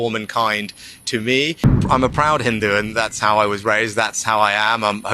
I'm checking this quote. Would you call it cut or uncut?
cut